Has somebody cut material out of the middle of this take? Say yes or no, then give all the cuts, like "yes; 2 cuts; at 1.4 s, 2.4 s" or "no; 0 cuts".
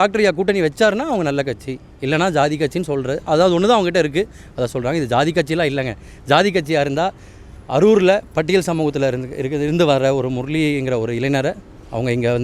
no; 0 cuts